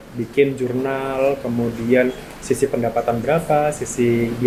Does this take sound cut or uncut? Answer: uncut